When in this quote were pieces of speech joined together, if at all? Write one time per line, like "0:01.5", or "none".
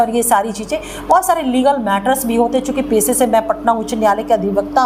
none